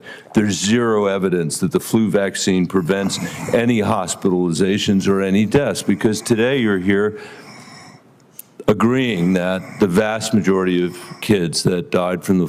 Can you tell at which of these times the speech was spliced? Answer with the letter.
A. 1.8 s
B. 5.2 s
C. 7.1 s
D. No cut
D